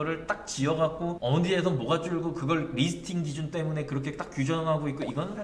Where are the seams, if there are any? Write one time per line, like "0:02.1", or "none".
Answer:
0:01.2